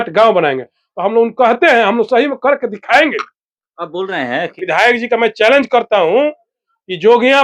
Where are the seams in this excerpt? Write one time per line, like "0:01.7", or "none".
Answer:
0:04.5